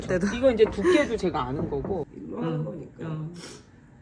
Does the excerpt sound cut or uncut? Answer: cut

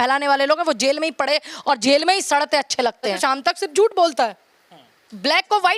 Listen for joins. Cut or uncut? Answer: cut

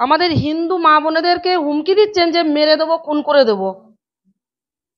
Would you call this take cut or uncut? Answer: uncut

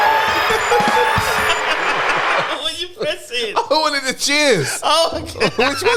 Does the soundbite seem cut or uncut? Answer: uncut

